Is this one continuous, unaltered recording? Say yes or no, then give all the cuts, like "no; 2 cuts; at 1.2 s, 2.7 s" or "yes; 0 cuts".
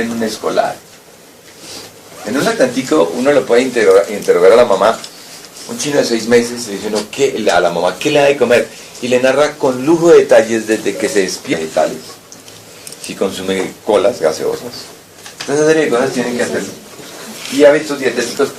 yes; 0 cuts